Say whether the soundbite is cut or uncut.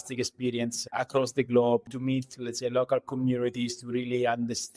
cut